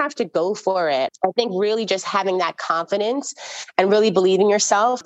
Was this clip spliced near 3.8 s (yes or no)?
no